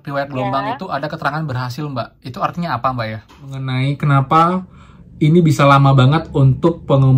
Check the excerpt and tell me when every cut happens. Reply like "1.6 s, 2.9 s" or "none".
3.7 s

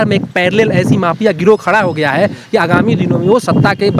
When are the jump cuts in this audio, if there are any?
none

